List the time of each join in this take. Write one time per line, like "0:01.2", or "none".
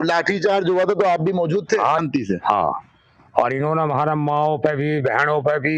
0:02.0